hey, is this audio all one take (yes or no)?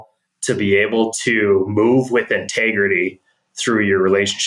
yes